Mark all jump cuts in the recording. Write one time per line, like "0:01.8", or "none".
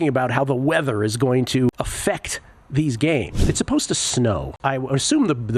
0:01.7
0:03.5
0:04.5